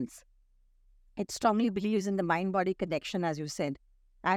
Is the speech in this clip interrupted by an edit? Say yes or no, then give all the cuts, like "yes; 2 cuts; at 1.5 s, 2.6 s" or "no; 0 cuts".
no; 0 cuts